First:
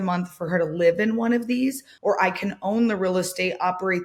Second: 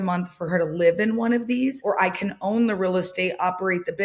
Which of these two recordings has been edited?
second; 1 cut; at 1.8 s

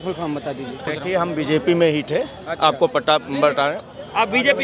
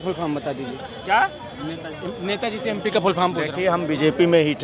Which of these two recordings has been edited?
first; 1 cut; at 0.9 s

